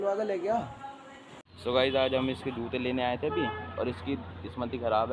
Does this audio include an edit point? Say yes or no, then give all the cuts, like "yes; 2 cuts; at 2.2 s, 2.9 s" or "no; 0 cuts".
yes; 1 cut; at 1.6 s